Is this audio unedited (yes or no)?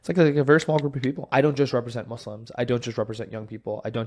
no